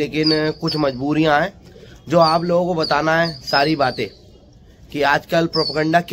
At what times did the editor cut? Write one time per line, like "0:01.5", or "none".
none